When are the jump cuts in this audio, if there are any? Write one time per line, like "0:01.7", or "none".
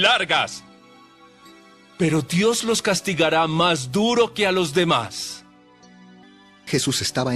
0:06.2